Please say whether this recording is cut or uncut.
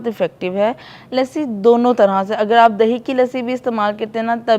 cut